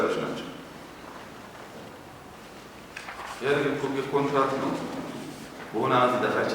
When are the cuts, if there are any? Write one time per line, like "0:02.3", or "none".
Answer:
0:02.3